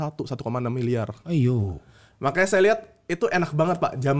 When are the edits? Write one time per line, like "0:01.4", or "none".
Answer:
none